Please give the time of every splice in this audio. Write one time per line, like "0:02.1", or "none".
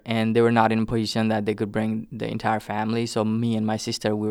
none